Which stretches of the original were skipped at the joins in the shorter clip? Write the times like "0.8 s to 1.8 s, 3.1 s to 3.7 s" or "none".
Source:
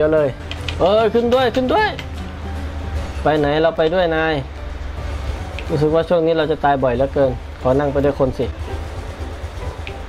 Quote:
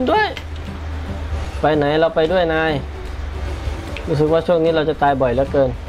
none